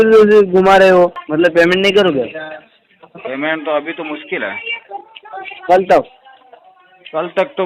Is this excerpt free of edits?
no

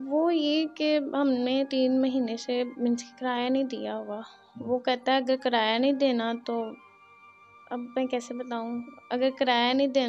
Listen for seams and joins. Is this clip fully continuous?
yes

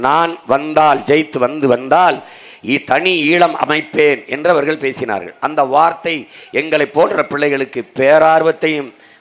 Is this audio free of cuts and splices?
yes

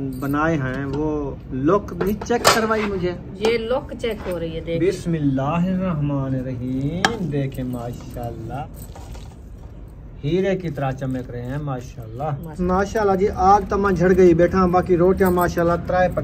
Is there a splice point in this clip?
yes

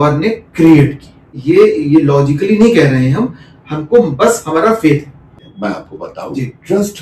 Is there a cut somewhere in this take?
yes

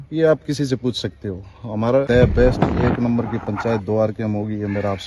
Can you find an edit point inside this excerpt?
yes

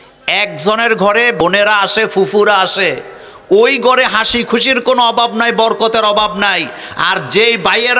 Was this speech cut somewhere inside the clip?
yes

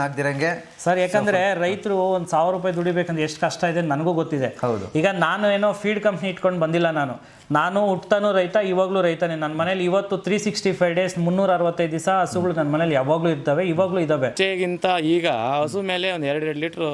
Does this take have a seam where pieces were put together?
yes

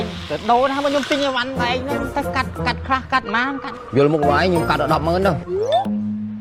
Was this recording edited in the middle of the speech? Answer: no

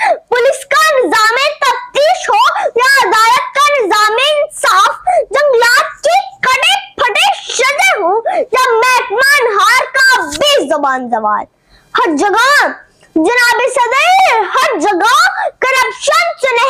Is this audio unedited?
yes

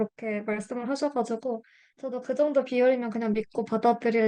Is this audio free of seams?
yes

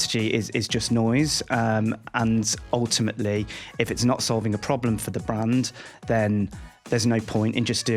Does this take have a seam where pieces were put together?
no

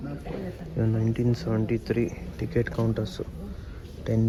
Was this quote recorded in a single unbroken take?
yes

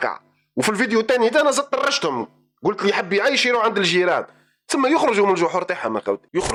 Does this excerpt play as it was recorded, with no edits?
yes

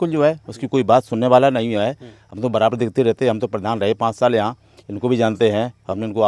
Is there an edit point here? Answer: no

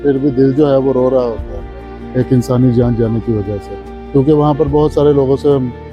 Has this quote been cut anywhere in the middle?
no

